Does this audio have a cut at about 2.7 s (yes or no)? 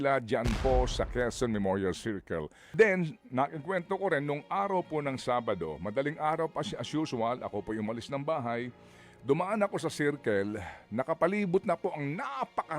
yes